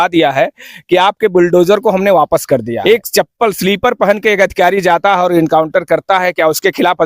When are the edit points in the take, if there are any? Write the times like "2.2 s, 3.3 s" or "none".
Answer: 2.7 s